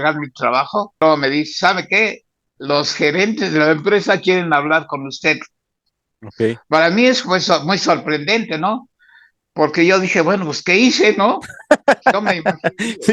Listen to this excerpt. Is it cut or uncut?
cut